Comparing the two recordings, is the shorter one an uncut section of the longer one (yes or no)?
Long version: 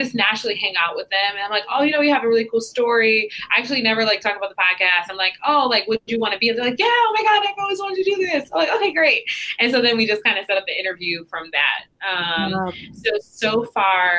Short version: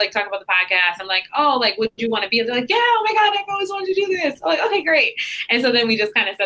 yes